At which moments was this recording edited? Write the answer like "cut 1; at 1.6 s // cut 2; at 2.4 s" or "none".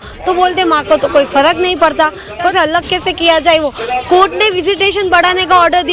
cut 1; at 2.5 s